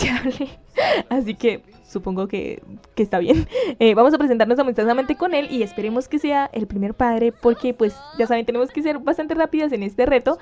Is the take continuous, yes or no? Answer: yes